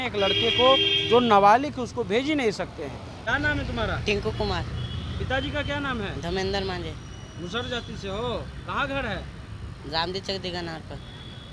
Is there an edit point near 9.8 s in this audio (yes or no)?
no